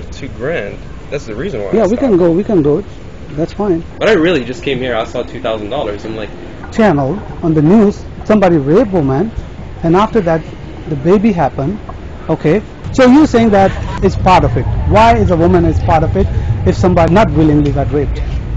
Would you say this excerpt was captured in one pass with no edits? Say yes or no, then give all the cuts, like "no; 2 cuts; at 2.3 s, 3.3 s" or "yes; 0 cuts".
no; 5 cuts; at 3.9 s, 6.6 s, 12.8 s, 13.9 s, 17.1 s